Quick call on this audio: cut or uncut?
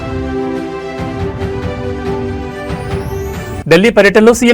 cut